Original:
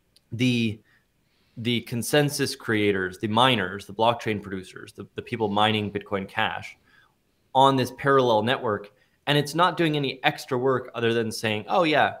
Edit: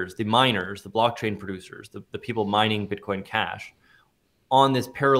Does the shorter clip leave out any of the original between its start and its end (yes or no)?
no